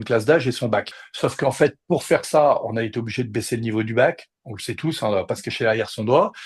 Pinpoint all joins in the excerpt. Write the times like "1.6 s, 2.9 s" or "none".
1.0 s